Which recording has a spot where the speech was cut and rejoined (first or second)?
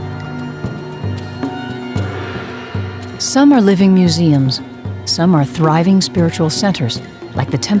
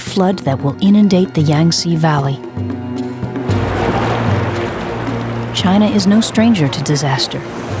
second